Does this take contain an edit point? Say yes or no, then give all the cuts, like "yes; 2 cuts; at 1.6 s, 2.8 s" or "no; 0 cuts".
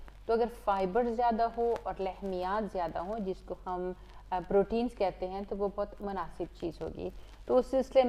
no; 0 cuts